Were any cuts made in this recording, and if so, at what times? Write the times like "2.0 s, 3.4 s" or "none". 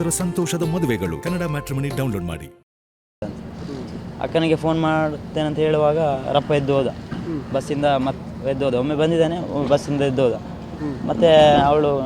3.2 s